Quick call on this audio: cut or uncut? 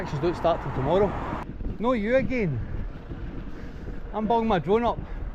cut